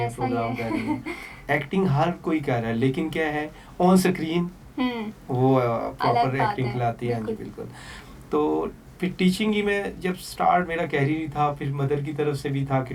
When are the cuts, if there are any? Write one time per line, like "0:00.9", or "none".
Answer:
none